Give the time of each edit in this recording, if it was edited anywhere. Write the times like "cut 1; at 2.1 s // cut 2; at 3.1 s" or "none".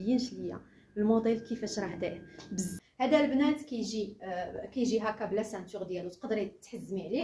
cut 1; at 2.7 s